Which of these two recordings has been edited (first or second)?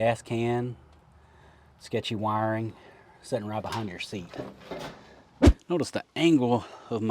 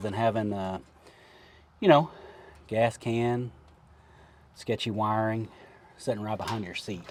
first